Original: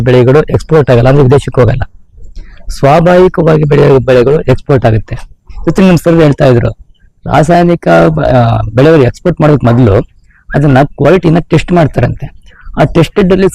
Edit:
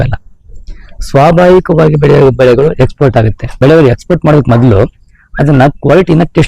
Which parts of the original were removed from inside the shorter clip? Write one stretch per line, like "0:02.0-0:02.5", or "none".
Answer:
0:05.1-0:08.6